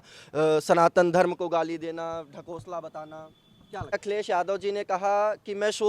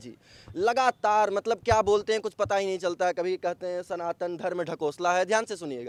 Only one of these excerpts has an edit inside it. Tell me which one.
first; 1 cut; at 3.9 s

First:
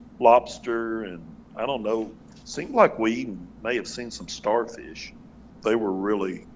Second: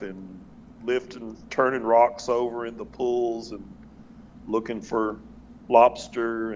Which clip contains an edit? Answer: first; 1 cut; at 5.4 s

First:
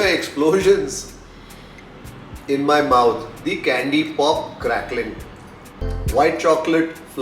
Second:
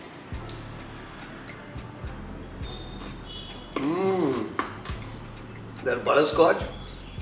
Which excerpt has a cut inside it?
first; 1 cut; at 5.9 s

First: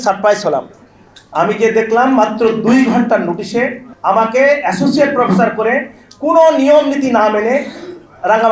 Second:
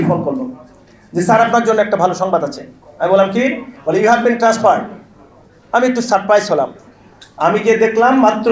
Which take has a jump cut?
first; 1 cut; at 3.9 s

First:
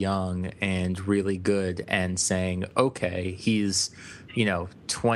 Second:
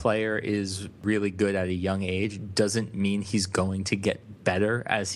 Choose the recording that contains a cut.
second; 1 cut; at 1.0 s

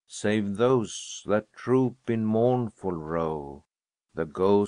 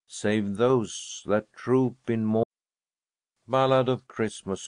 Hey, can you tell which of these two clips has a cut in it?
first; 1 cut; at 2.4 s

